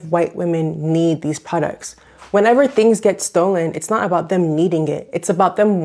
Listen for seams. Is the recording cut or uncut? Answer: uncut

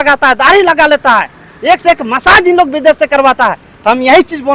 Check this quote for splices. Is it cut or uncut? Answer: uncut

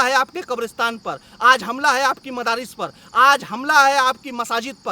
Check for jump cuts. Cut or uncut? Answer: uncut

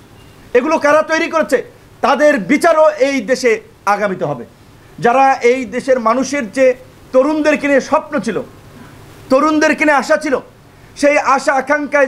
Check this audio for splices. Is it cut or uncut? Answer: uncut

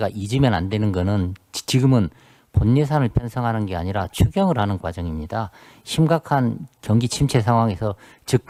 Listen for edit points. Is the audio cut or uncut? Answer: uncut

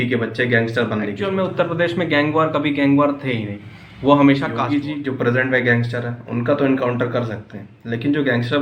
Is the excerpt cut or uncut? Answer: cut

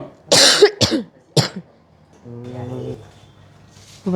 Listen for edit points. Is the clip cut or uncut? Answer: cut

